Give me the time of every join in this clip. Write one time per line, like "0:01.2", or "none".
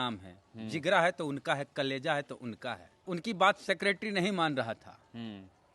0:03.1